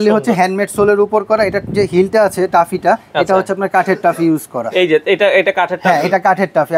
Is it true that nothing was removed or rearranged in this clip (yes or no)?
yes